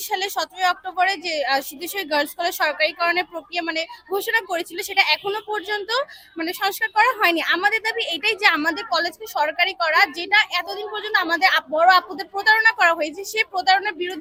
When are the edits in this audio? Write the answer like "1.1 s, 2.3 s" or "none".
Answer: none

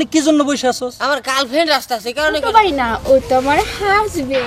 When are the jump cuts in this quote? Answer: 2.4 s

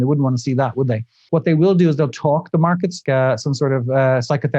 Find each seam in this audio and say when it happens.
1.2 s, 3.0 s

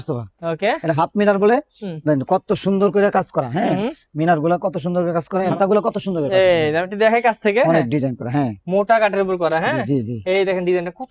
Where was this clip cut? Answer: none

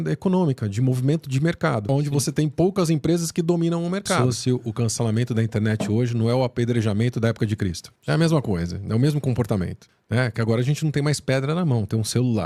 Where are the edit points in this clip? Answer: 1.8 s, 4.2 s

